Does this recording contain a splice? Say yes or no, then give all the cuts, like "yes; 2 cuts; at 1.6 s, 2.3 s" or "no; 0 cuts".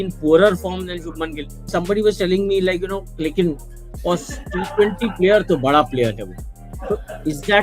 yes; 1 cut; at 1.7 s